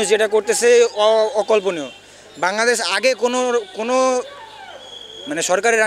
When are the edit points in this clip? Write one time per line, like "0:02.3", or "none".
none